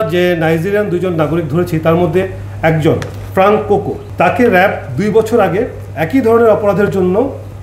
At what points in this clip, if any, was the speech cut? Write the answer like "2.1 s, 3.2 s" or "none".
4.0 s